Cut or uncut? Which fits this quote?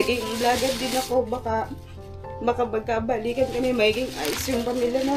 uncut